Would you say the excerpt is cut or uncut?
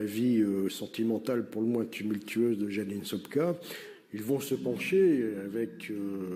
uncut